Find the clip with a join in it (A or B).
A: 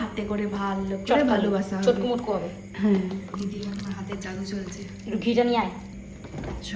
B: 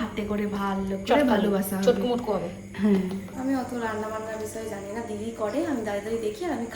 B